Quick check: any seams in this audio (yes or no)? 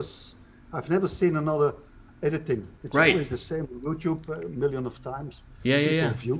yes